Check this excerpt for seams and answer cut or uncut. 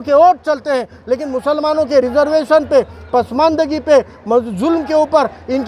uncut